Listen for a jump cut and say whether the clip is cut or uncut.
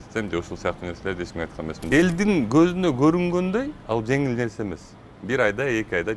cut